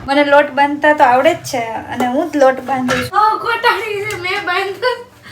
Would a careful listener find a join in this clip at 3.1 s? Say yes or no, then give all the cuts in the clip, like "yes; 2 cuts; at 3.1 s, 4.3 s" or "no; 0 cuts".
yes; 1 cut; at 3.1 s